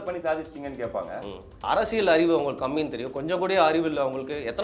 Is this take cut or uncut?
cut